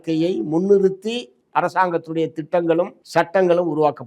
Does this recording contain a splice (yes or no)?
yes